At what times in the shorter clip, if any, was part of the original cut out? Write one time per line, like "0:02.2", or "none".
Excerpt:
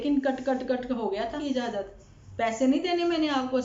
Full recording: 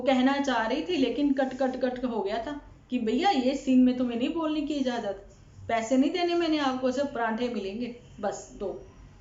0:01.4